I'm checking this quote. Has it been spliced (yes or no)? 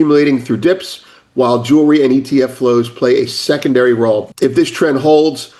yes